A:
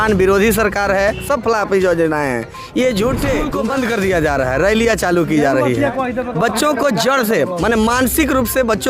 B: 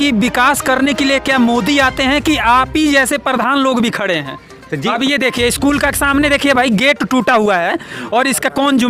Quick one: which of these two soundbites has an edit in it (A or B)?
A